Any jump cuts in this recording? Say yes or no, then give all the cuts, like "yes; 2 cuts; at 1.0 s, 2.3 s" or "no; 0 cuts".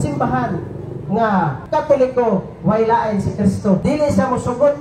yes; 2 cuts; at 1.6 s, 3.8 s